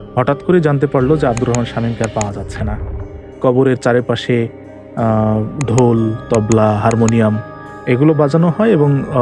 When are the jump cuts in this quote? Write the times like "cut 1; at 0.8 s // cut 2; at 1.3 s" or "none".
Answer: cut 1; at 3.4 s